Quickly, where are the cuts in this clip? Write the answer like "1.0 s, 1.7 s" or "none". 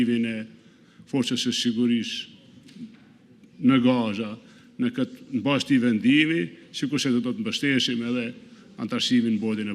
none